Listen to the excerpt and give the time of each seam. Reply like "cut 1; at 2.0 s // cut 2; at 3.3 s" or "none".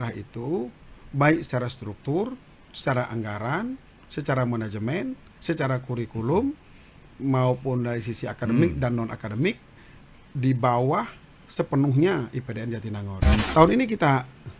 cut 1; at 13.4 s